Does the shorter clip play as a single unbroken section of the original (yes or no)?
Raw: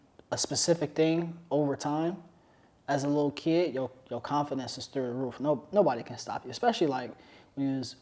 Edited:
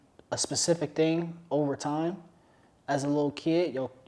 yes